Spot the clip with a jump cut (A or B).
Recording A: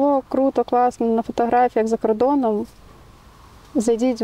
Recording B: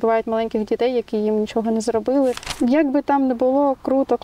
B